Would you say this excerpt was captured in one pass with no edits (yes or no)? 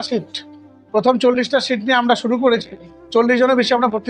yes